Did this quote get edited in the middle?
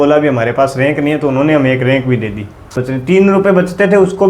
yes; 1 cut; at 2.6 s

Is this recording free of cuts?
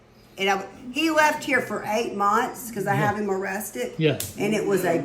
yes; 0 cuts

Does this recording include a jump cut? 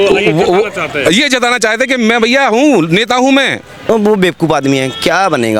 yes; 1 cut; at 3.7 s

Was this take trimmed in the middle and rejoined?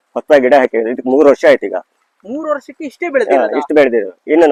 no; 0 cuts

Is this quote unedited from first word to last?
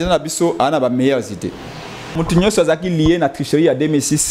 no; 1 cut; at 2.1 s

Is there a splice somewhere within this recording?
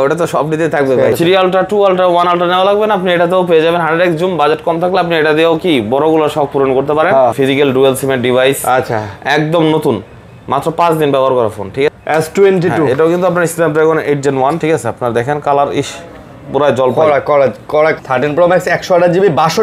yes; 4 cuts; at 1.1 s, 7.3 s, 11.9 s, 18.0 s

